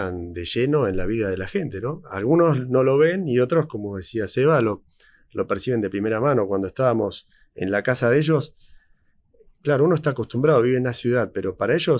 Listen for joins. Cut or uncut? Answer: uncut